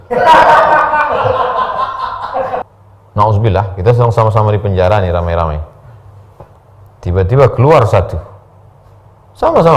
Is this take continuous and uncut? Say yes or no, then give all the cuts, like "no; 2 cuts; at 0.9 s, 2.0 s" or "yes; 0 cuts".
no; 1 cut; at 2.6 s